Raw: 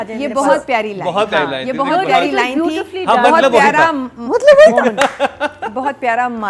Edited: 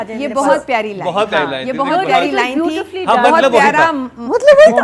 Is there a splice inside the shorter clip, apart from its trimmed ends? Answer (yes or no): no